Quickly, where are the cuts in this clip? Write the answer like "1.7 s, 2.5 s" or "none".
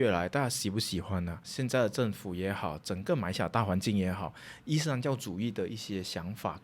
1.4 s